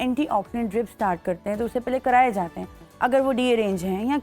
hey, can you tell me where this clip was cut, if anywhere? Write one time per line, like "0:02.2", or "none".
none